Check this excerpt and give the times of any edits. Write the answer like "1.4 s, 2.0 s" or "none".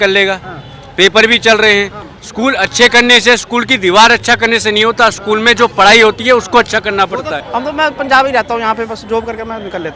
7.4 s